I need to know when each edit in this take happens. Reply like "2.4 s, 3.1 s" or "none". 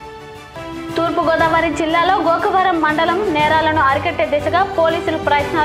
0.9 s